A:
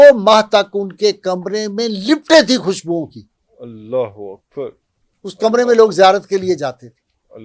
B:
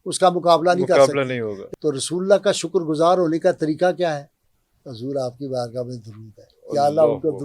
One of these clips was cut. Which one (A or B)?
B